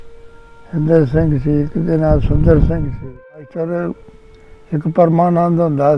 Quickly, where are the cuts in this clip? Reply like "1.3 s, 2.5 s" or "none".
2.9 s

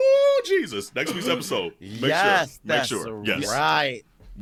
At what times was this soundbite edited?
none

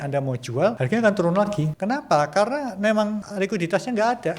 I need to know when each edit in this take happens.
0.8 s, 1.7 s, 3.3 s

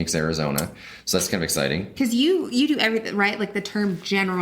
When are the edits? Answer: 1.9 s

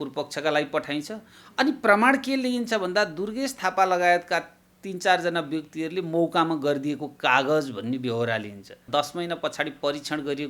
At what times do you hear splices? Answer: 8.8 s

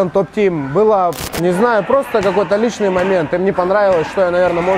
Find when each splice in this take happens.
1.3 s

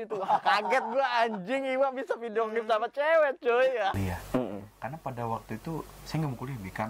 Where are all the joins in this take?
4.0 s

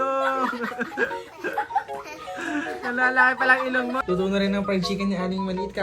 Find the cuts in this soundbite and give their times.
4.0 s

